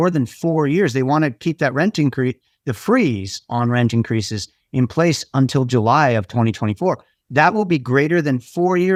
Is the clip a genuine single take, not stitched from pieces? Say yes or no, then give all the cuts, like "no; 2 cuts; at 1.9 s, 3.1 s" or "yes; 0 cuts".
yes; 0 cuts